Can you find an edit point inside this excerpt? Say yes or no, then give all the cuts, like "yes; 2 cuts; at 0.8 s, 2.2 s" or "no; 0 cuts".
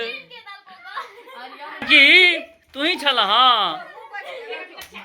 yes; 1 cut; at 1.9 s